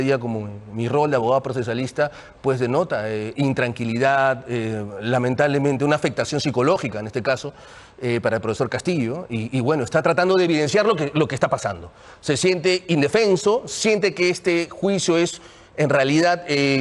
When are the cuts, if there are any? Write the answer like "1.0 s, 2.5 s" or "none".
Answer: none